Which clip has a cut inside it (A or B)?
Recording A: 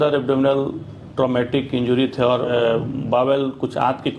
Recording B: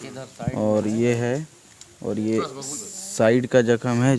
A